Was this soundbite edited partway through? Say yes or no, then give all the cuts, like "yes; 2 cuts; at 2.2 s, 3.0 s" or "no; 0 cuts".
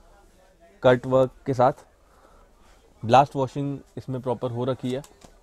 no; 0 cuts